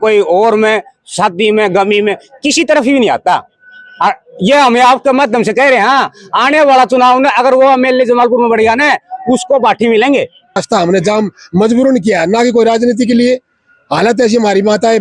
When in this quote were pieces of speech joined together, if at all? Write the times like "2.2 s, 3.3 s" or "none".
10.6 s